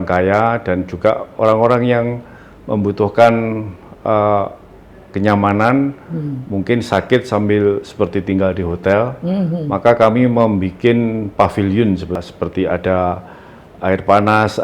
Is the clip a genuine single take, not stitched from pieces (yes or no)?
no